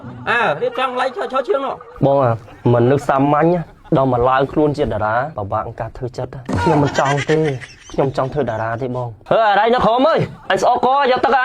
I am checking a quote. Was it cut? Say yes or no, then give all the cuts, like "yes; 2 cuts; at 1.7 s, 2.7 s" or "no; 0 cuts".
yes; 1 cut; at 9.1 s